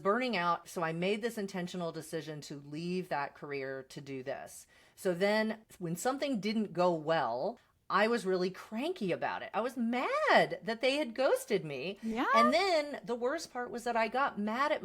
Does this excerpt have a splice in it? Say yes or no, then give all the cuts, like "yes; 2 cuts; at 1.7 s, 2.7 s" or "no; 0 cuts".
yes; 1 cut; at 7.7 s